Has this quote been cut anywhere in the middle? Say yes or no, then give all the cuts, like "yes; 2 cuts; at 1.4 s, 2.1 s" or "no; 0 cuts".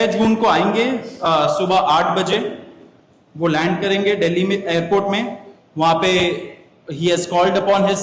no; 0 cuts